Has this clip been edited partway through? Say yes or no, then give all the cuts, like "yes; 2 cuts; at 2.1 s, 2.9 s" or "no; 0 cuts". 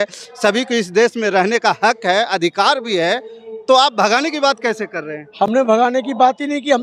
no; 0 cuts